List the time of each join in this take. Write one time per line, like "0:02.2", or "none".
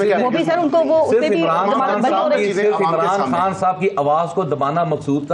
none